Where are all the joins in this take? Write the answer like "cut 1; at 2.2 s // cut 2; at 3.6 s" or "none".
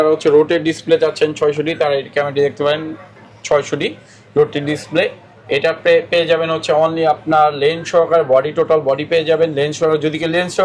none